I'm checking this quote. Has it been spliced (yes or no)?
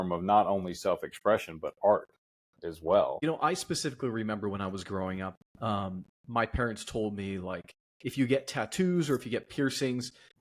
yes